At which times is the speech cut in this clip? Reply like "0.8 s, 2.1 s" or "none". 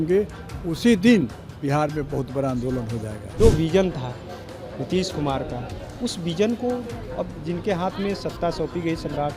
3.2 s

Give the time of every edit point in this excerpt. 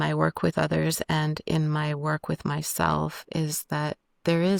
none

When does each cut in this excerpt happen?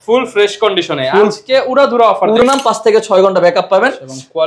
2.4 s

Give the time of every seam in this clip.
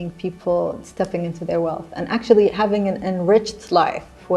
none

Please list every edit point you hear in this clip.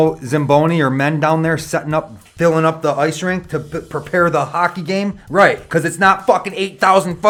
none

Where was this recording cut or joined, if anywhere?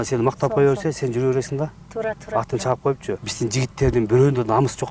3.3 s

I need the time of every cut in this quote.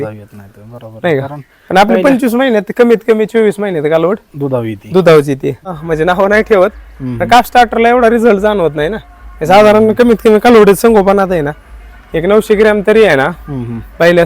5.8 s

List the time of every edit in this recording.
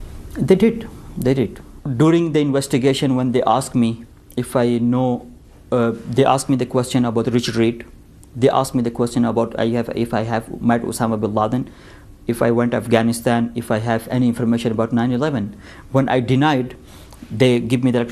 none

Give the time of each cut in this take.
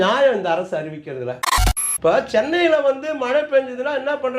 1.5 s

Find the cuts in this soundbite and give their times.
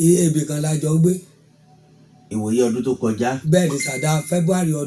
none

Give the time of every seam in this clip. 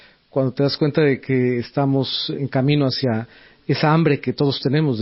2.4 s

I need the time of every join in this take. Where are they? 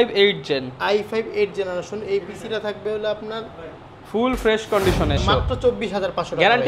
5.2 s

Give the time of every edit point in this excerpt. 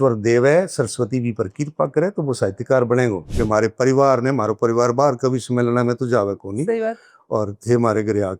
3.3 s

